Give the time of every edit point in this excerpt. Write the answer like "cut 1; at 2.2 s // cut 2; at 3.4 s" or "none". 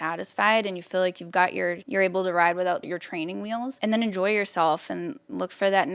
cut 1; at 1.8 s // cut 2; at 3.7 s

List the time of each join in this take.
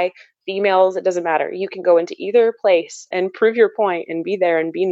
cut 1; at 3.1 s

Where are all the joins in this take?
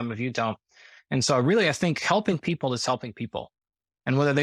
none

